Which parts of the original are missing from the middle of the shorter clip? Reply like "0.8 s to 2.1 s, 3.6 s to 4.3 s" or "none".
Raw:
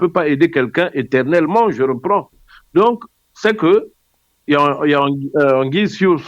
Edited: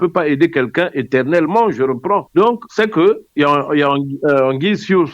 2.7 s to 3.8 s